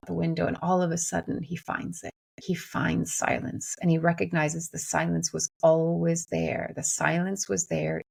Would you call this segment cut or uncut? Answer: uncut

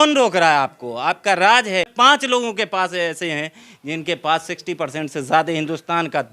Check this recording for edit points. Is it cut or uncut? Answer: cut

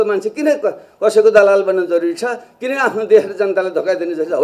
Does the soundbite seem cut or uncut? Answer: uncut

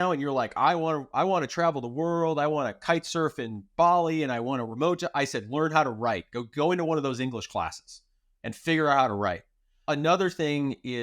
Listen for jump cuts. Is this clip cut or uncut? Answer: uncut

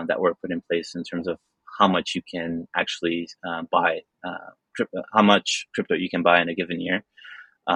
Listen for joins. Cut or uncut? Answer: uncut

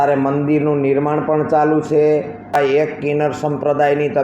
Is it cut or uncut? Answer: cut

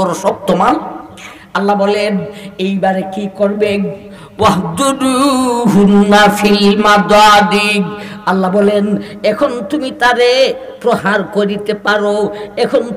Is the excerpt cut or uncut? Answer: uncut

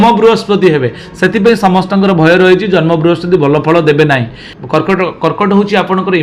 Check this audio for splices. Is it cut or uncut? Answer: cut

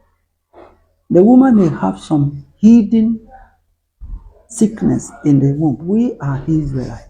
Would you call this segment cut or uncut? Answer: cut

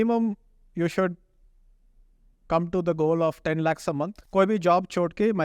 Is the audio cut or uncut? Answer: cut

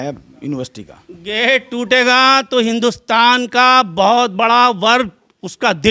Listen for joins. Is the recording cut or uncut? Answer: uncut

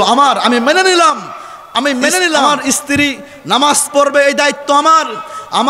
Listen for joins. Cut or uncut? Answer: cut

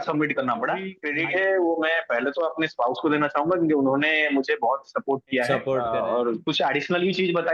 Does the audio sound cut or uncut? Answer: cut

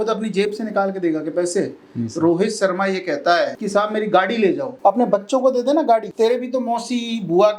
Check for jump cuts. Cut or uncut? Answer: cut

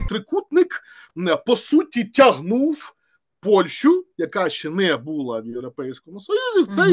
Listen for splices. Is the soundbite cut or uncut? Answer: uncut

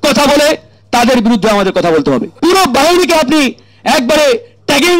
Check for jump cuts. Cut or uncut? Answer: cut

